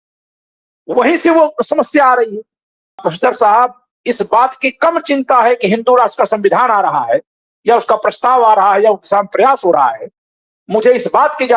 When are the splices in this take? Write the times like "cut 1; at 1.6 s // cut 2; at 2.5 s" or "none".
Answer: cut 1; at 3.1 s